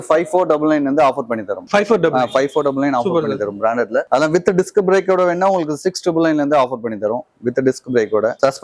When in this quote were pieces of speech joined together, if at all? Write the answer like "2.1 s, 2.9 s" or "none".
none

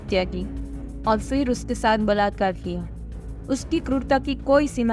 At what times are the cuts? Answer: none

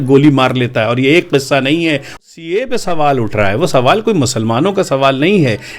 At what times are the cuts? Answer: 2.2 s

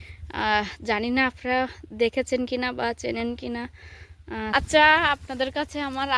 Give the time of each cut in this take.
4.5 s

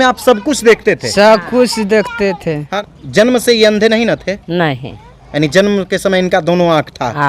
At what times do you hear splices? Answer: 2.7 s

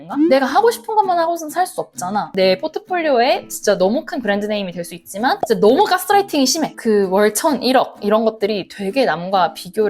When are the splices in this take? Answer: 2.4 s, 6.7 s

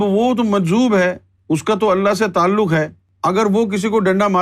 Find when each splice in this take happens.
1.3 s, 3.0 s

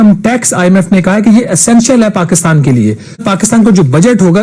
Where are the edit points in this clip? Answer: 3.2 s

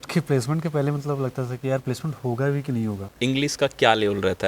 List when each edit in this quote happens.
3.1 s

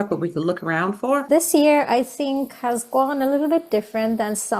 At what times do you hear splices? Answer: 1.3 s

